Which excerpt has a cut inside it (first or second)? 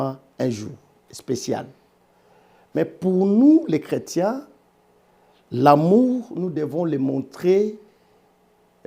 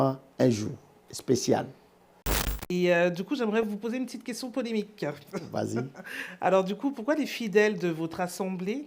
second